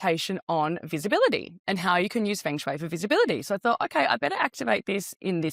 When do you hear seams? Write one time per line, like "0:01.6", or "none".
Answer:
none